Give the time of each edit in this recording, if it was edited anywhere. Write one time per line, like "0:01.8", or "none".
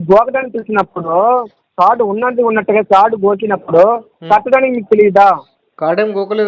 none

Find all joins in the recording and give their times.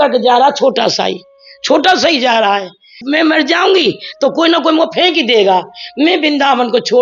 0:02.9

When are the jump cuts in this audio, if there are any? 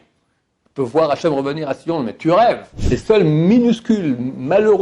0:02.7

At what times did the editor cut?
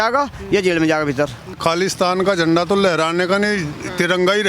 0:01.6

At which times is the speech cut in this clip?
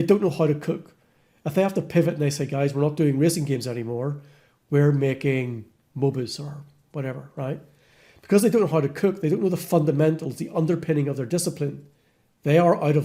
none

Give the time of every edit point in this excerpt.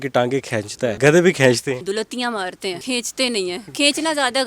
0:01.0
0:01.8
0:02.8

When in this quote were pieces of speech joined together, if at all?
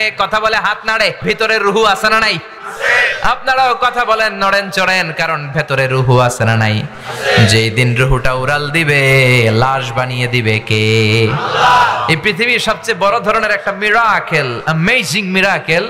0:01.2

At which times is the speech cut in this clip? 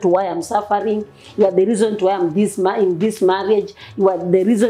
none

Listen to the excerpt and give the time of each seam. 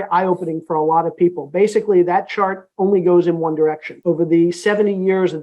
0:03.9

